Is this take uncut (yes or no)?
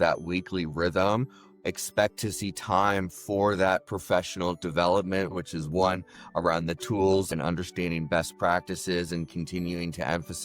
no